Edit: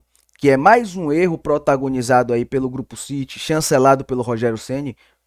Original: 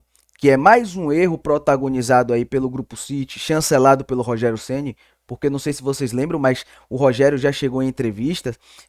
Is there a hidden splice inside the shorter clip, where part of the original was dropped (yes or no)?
no